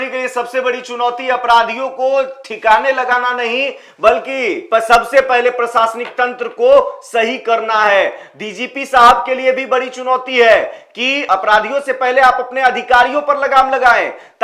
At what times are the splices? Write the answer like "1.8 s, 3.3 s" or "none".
none